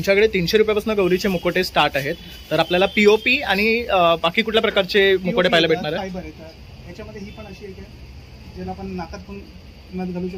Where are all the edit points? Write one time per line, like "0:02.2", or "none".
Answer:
none